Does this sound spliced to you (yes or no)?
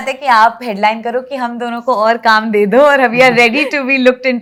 no